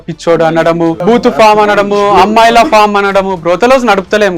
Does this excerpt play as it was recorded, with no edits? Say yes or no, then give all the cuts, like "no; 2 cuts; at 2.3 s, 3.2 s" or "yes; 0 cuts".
no; 1 cut; at 1.0 s